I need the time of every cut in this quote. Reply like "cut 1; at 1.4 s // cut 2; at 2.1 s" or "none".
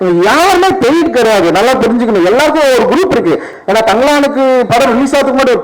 cut 1; at 3.5 s